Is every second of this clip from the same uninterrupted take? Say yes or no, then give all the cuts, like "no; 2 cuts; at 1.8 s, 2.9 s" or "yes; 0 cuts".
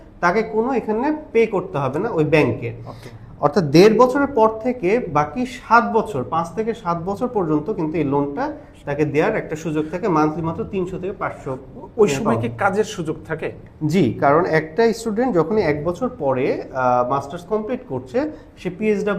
yes; 0 cuts